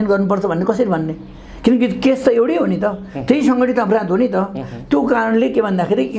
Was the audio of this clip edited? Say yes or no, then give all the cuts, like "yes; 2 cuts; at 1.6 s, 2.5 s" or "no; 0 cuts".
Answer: no; 0 cuts